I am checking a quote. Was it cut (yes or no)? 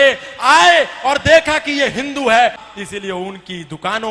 yes